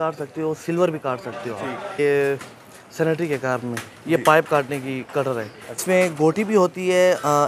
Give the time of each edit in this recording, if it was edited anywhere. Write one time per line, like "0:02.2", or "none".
0:01.9
0:05.8